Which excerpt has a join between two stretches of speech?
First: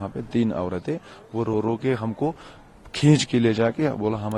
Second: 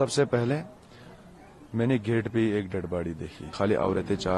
second; 1 cut; at 3.4 s

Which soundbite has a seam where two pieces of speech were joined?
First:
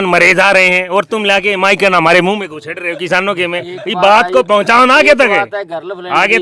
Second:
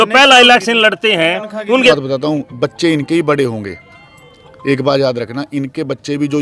second; 1 cut; at 1.9 s

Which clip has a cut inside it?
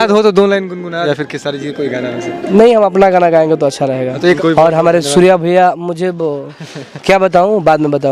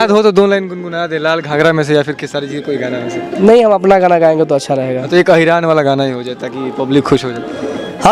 first; 2 cuts; at 1.1 s, 4.4 s

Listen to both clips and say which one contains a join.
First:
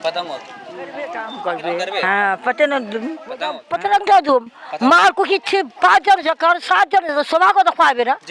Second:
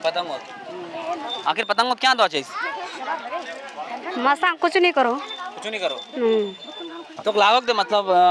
first; 2 cuts; at 1.1 s, 3.6 s

